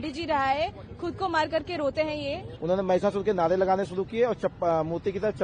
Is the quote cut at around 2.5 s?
yes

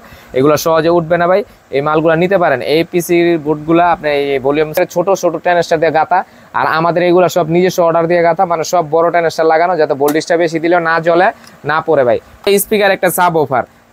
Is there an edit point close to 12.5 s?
yes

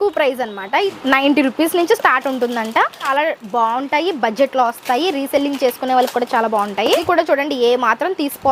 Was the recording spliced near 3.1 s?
yes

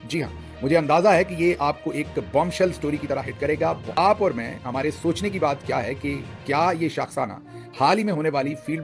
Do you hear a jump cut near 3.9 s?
yes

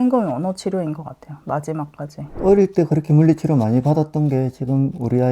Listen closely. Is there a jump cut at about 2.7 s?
no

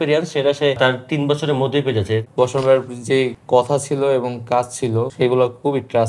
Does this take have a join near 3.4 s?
yes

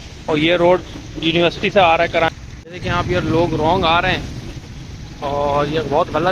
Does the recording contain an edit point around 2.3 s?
yes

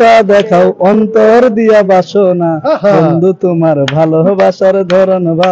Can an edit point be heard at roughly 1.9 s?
no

